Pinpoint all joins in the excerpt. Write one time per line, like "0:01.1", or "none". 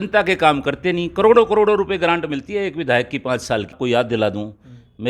0:03.8